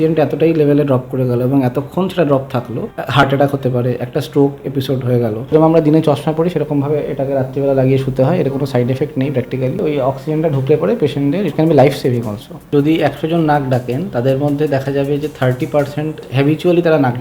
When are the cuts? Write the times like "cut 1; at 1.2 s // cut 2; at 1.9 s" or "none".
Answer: cut 1; at 3.3 s // cut 2; at 5.5 s // cut 3; at 9.8 s // cut 4; at 12.6 s // cut 5; at 16.2 s